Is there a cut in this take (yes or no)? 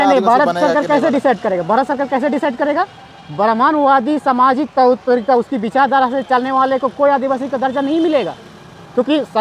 no